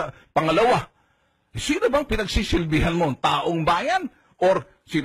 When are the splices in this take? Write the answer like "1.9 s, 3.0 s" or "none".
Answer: 2.8 s